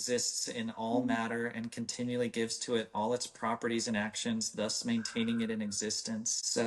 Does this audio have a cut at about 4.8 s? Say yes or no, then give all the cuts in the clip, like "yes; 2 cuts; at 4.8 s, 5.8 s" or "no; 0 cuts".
no; 0 cuts